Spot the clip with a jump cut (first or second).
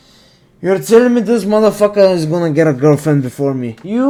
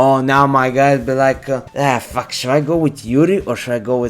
second